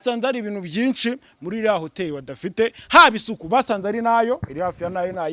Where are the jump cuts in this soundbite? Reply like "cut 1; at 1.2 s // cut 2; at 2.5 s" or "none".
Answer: none